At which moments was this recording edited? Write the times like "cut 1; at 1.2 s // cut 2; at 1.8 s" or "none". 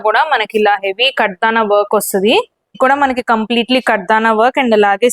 cut 1; at 2.8 s

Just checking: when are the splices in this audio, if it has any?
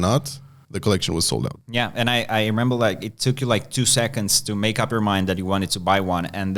cut 1; at 1.6 s

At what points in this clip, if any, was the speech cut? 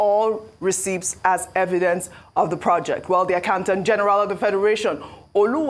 none

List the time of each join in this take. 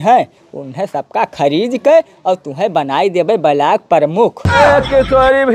cut 1; at 4.6 s

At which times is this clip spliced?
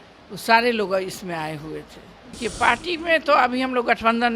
cut 1; at 2.4 s

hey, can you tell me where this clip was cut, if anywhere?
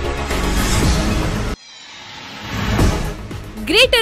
cut 1; at 1.4 s // cut 2; at 2.7 s

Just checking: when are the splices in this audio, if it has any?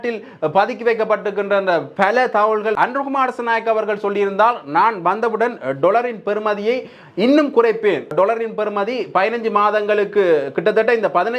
cut 1; at 2.8 s // cut 2; at 8.1 s

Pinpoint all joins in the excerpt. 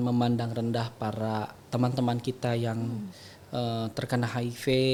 none

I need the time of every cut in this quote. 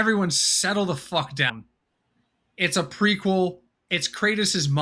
cut 1; at 1.5 s

